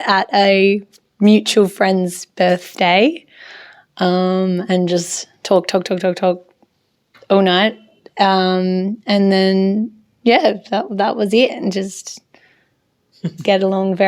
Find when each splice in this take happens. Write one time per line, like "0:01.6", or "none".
none